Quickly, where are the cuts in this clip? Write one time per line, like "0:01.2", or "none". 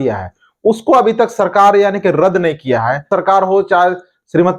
0:03.1